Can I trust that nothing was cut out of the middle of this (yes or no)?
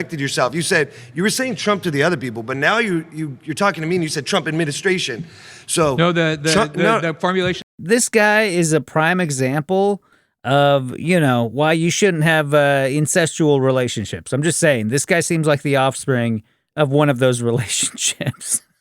no